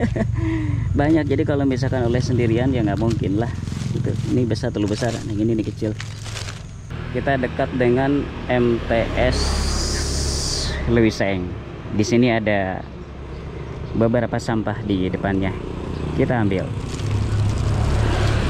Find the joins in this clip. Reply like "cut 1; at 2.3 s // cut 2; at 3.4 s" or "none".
cut 1; at 6.9 s